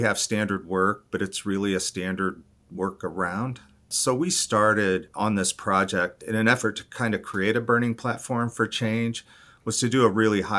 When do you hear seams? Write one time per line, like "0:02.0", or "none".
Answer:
0:03.9
0:05.1
0:06.2